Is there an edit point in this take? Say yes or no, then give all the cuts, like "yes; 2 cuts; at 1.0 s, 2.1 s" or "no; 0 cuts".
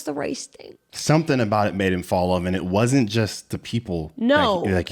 no; 0 cuts